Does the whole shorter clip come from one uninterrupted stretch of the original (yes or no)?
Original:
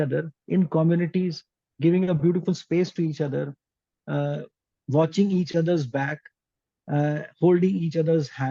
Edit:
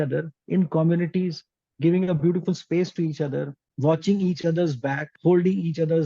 no